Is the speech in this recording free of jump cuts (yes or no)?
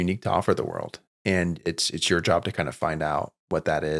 yes